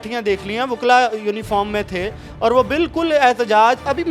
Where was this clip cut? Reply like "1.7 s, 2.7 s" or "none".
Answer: none